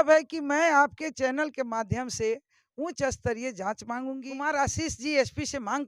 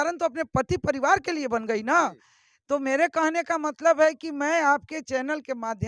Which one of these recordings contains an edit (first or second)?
first